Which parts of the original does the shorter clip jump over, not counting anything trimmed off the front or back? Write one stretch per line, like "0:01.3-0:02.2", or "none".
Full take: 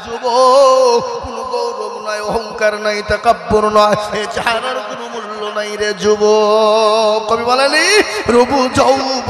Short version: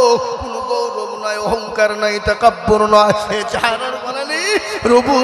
0:05.2-0:07.8